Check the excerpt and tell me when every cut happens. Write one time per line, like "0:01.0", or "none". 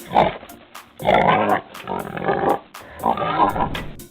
0:01.7